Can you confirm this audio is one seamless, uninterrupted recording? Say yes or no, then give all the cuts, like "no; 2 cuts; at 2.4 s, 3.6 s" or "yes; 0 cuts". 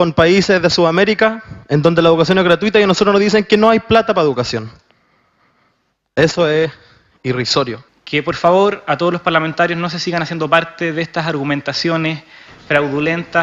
no; 1 cut; at 10.4 s